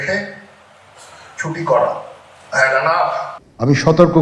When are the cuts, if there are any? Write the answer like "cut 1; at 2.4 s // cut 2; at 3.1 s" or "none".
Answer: cut 1; at 3.3 s